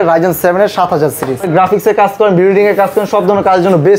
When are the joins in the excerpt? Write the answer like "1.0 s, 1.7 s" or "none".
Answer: 1.5 s